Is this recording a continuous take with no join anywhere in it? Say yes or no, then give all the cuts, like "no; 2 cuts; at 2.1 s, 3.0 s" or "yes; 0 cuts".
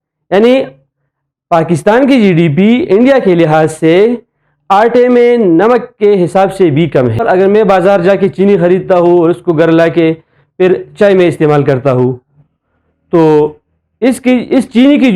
no; 1 cut; at 7.2 s